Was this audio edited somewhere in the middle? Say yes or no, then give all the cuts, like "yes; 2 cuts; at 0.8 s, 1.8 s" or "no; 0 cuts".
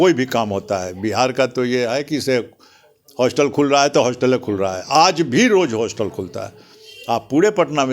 no; 0 cuts